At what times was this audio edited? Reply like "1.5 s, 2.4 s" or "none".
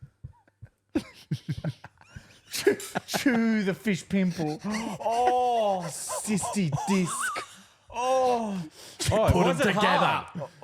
none